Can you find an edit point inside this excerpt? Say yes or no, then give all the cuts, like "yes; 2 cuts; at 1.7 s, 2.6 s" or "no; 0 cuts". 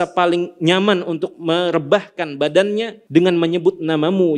yes; 1 cut; at 3.0 s